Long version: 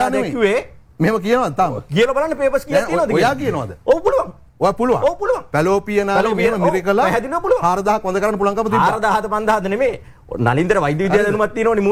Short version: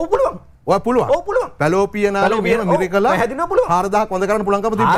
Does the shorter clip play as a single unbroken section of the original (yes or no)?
yes